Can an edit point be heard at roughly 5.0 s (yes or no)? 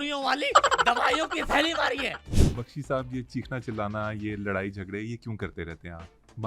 no